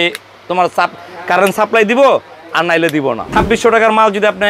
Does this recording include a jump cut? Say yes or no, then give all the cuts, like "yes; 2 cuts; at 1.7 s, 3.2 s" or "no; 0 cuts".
yes; 1 cut; at 3.2 s